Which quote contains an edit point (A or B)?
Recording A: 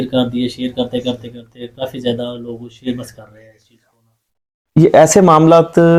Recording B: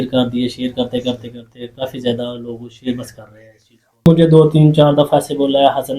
B